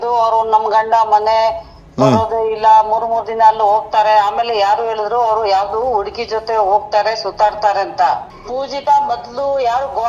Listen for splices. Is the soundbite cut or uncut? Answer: cut